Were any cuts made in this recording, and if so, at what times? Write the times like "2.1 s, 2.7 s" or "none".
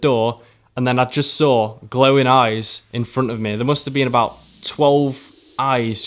none